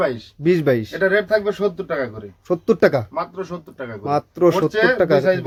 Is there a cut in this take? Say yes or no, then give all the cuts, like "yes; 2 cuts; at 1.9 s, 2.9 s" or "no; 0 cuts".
no; 0 cuts